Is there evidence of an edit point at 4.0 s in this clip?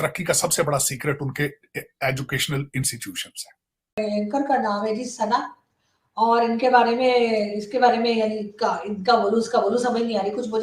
yes; 1 cut; at 4.0 s

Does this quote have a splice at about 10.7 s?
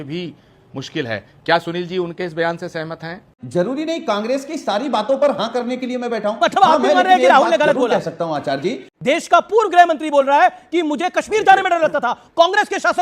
no; 2 cuts; at 3.4 s, 8.9 s

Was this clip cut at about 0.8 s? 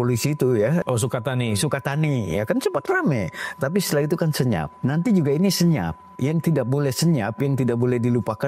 yes; 2 cuts; at 0.8 s, 4.7 s

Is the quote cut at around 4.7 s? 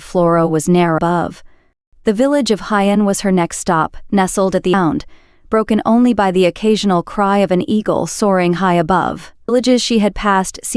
yes; 3 cuts; at 1.0 s, 4.7 s, 9.5 s

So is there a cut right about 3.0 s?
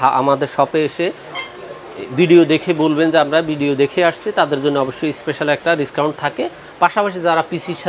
no; 0 cuts

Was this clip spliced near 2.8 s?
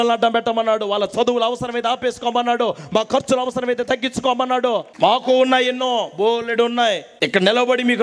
no; 2 cuts; at 4.9 s, 7.1 s

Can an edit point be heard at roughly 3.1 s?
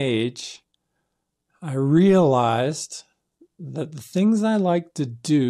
no; 0 cuts

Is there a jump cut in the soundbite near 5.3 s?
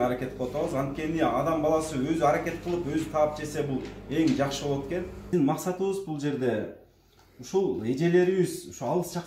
yes; 1 cut; at 5.3 s

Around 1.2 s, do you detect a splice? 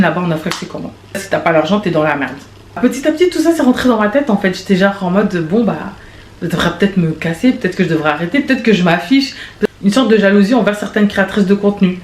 yes; 3 cuts; at 1.2 s, 2.8 s, 9.5 s

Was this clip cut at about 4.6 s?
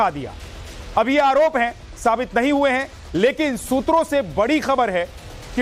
no; 1 cut; at 2.2 s

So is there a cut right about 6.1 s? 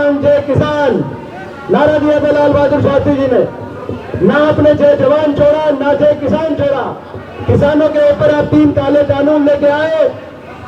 no; 0 cuts

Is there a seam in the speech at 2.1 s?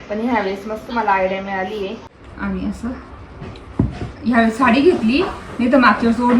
yes; 1 cut; at 2.1 s

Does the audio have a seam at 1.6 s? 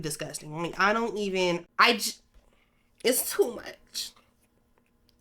yes; 1 cut; at 1.6 s

